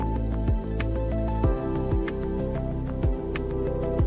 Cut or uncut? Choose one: uncut